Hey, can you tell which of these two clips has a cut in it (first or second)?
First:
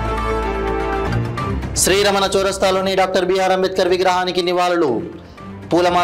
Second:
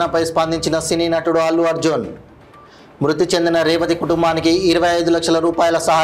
first